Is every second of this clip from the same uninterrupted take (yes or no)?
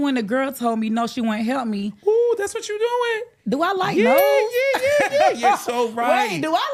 yes